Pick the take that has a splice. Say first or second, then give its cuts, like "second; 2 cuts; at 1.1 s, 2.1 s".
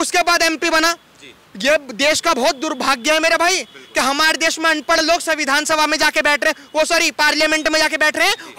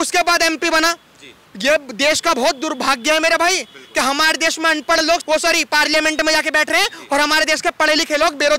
second; 1 cut; at 5.2 s